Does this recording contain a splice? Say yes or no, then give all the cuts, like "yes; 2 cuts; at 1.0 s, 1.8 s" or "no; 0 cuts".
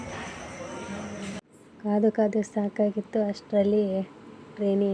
yes; 1 cut; at 1.5 s